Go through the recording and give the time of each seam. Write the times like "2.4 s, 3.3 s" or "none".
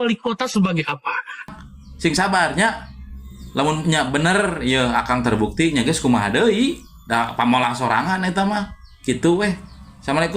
1.4 s